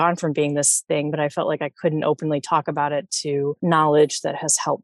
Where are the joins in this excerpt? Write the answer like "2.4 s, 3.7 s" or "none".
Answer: 1.1 s, 3.6 s

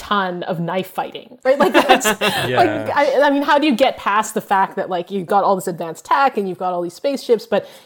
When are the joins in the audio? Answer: none

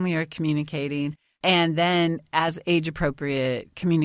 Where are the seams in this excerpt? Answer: 1.2 s

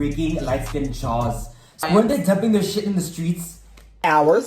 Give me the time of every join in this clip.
1.9 s

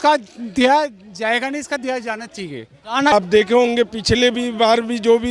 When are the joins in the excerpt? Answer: 3.1 s

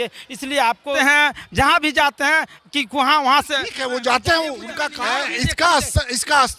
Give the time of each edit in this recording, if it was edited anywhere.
1.0 s, 4.9 s

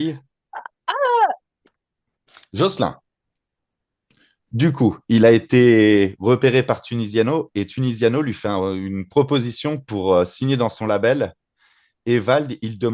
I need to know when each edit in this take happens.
1.5 s

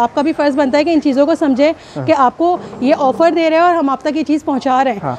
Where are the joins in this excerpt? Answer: none

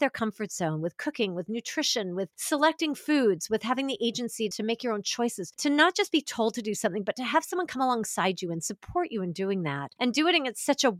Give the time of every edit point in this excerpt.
none

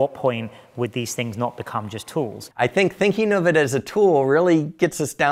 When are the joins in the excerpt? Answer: 2.4 s

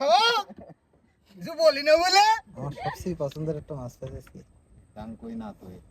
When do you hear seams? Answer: 3.0 s

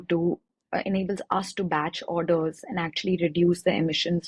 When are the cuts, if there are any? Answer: none

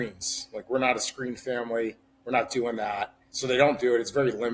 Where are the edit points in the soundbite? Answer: 3.2 s

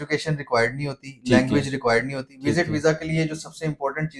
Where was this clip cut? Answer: none

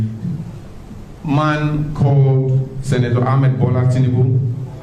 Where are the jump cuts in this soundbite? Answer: none

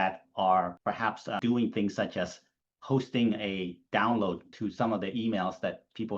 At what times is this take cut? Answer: 0.8 s, 4.5 s

